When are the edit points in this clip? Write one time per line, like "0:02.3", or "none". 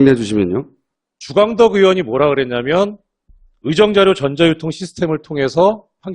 0:05.1